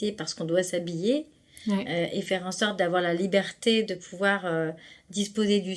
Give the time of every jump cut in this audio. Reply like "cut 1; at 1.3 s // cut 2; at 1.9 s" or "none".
none